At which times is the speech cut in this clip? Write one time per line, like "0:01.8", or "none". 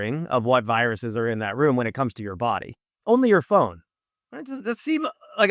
0:02.9